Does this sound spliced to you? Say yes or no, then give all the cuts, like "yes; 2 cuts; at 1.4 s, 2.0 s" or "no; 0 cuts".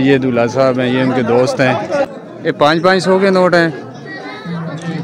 yes; 1 cut; at 2.1 s